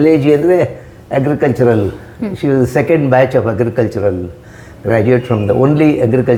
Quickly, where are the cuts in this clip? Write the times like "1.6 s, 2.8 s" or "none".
none